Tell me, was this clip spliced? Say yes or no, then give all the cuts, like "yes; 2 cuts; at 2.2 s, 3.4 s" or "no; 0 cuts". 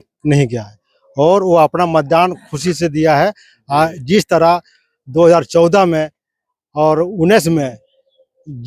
no; 0 cuts